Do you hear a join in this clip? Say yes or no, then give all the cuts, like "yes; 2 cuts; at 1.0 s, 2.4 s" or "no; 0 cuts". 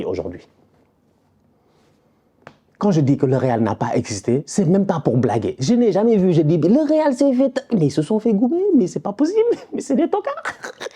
no; 0 cuts